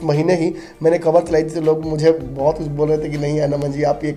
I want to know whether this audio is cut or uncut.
uncut